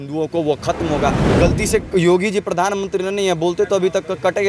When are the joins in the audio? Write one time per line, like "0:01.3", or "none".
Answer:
0:01.2